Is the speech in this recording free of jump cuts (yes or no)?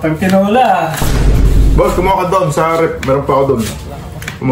no